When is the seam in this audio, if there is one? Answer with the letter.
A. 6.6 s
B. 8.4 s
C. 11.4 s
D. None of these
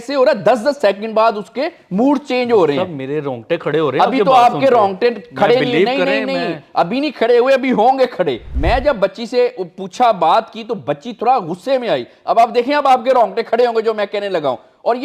B